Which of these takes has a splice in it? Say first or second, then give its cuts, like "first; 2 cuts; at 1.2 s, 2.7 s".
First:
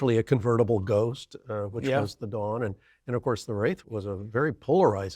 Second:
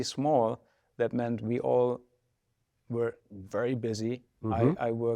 first; 1 cut; at 3.8 s